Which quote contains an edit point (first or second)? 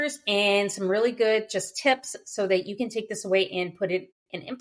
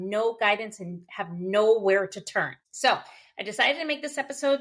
second